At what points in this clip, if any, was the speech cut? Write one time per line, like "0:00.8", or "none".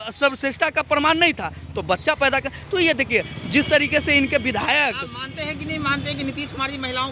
none